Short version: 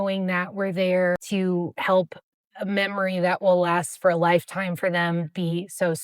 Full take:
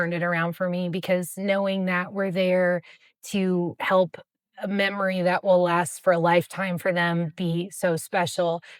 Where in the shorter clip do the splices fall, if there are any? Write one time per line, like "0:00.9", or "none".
0:01.2